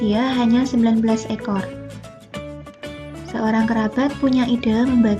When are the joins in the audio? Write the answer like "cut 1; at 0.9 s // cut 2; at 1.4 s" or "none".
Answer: cut 1; at 1.6 s // cut 2; at 3.3 s